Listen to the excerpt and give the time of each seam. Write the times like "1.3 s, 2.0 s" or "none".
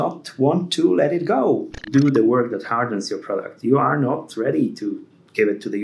1.8 s